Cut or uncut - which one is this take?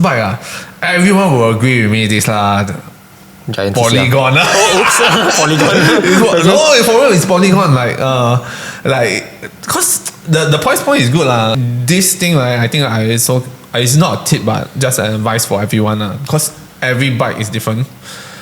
cut